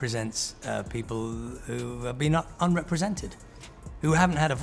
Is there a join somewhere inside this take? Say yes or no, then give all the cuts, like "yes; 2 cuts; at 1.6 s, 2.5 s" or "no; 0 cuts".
no; 0 cuts